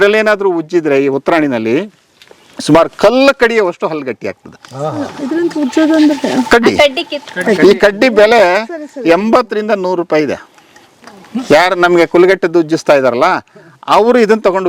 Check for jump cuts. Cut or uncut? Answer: uncut